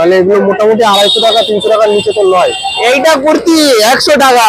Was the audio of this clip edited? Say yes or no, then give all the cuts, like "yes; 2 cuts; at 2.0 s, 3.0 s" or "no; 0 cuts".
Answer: yes; 1 cut; at 2.7 s